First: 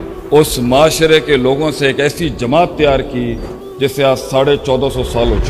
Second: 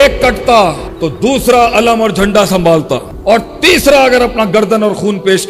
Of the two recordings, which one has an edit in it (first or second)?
second